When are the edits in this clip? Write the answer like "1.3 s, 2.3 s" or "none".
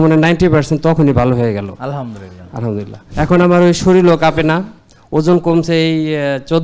3.0 s